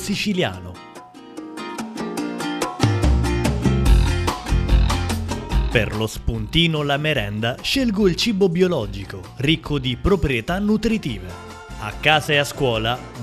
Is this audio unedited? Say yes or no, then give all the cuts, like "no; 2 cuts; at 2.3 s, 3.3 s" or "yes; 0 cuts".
yes; 0 cuts